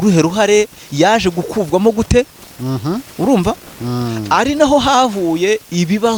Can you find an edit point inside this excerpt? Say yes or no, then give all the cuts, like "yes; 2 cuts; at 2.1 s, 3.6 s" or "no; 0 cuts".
no; 0 cuts